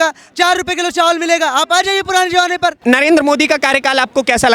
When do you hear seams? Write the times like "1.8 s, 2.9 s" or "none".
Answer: 2.8 s

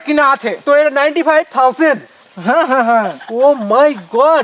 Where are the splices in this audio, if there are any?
none

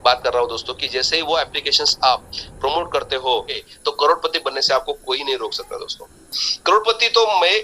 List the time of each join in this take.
3.6 s

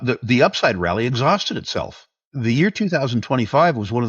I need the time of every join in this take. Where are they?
2.3 s

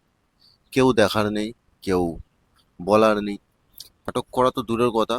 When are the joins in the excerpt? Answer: 4.1 s

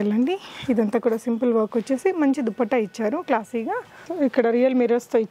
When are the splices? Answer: 4.0 s

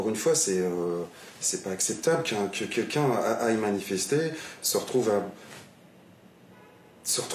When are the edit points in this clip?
none

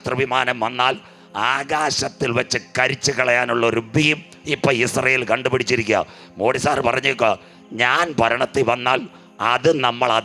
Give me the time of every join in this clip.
none

